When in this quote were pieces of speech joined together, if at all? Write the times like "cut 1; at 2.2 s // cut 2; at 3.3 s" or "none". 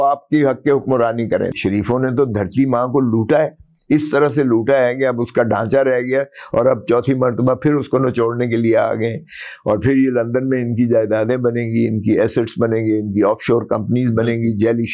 cut 1; at 1.5 s